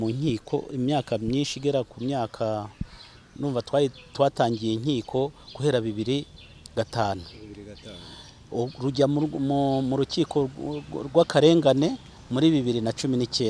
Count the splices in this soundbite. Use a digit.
0